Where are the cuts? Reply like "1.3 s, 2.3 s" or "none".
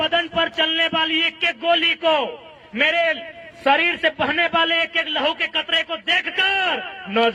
none